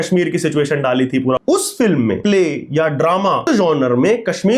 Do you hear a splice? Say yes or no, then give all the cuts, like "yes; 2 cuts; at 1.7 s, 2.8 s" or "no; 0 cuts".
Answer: yes; 3 cuts; at 1.4 s, 2.2 s, 3.4 s